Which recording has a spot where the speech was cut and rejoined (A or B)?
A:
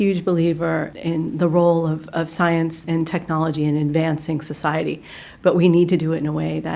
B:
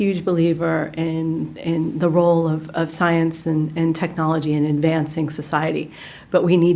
A